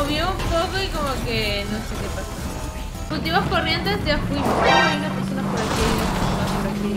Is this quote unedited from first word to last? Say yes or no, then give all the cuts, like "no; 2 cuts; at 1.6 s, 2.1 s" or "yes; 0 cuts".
no; 1 cut; at 3.1 s